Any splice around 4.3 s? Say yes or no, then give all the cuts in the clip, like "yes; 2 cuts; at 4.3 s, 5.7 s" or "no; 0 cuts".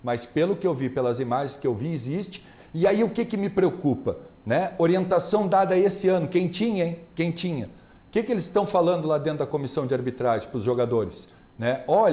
no; 0 cuts